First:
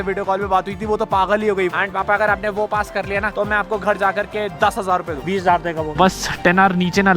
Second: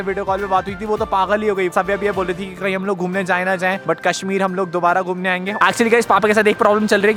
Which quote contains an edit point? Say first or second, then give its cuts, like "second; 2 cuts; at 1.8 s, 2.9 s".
first; 2 cuts; at 1.7 s, 5.9 s